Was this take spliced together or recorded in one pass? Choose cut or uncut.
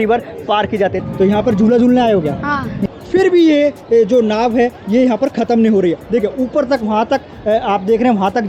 cut